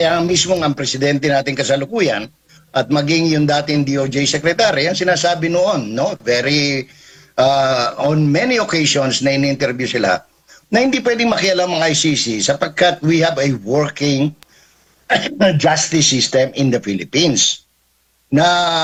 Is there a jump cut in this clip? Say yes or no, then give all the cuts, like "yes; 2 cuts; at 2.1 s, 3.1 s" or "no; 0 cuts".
no; 0 cuts